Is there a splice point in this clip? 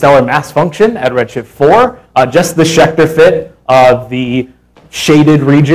no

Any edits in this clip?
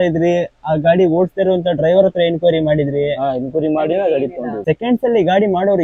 yes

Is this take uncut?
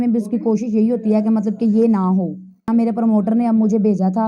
no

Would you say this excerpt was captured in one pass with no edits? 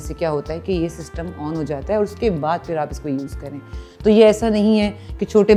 yes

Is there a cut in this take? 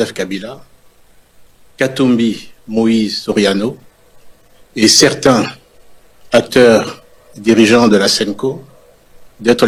no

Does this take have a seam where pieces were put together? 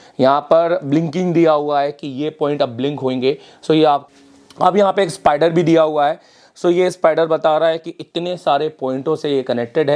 yes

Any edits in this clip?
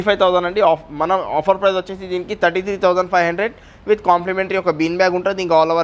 no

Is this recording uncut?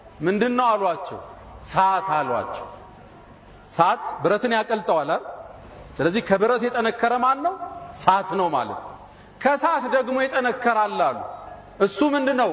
yes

